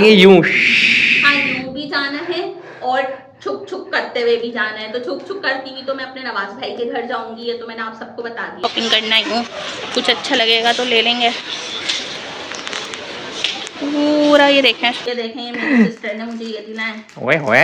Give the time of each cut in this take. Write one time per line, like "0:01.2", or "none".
0:08.6
0:14.7